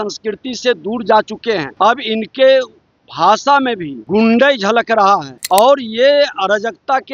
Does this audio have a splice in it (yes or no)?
yes